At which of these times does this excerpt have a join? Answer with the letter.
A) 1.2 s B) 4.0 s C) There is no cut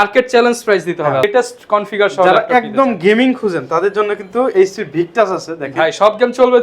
A